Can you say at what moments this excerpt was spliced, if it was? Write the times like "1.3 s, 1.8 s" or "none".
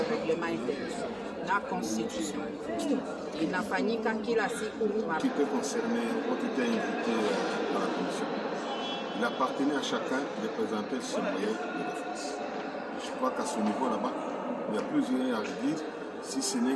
5.2 s